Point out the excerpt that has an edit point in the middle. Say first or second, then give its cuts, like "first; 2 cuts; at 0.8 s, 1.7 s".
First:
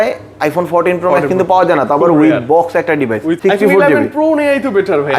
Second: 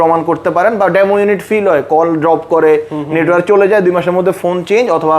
first; 1 cut; at 3.4 s